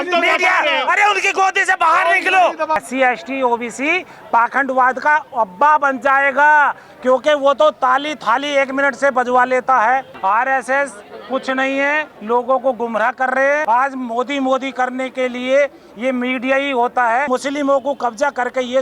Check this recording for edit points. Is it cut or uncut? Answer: cut